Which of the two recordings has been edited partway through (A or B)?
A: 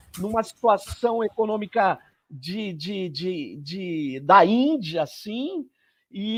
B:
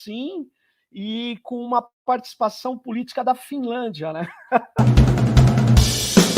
B